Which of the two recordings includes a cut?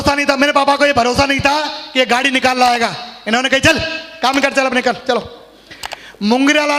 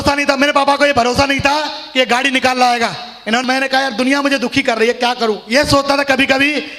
second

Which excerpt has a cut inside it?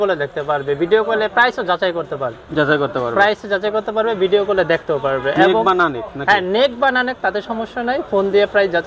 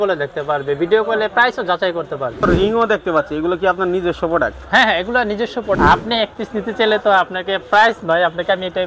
second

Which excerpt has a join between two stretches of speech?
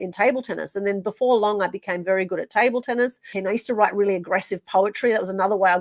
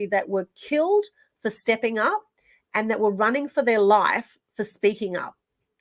first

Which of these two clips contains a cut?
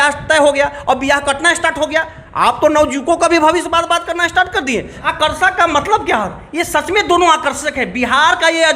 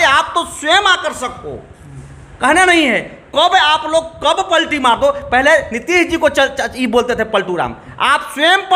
first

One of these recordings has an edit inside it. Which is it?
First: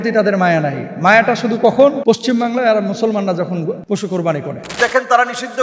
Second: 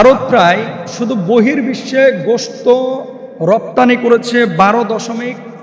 first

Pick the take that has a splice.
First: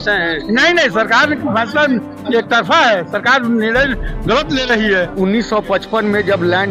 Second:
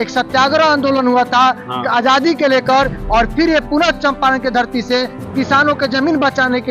first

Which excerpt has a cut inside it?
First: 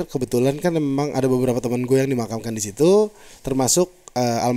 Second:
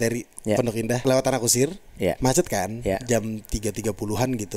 second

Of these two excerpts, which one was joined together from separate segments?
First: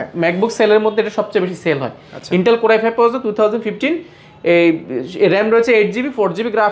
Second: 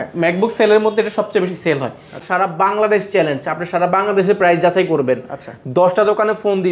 second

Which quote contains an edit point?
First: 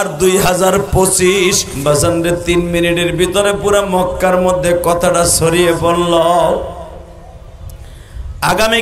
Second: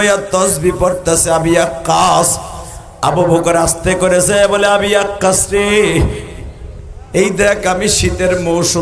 first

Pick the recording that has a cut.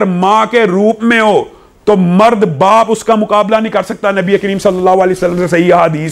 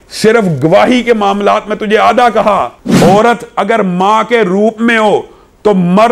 second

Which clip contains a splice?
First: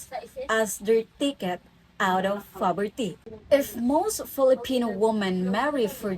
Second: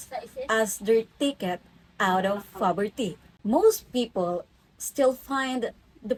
first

